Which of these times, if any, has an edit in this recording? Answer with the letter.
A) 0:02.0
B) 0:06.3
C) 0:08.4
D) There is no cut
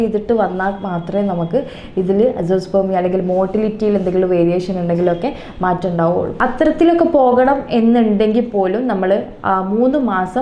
B